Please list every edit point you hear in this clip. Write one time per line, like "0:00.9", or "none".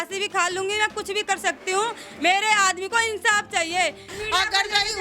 0:04.0